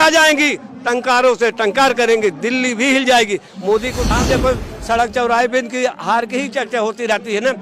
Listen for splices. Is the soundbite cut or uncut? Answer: cut